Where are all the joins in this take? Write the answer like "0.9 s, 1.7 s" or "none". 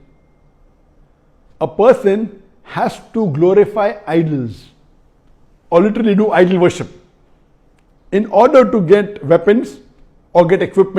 none